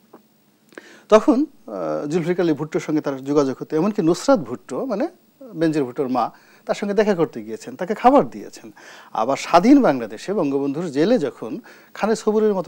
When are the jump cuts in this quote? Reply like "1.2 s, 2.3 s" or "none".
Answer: none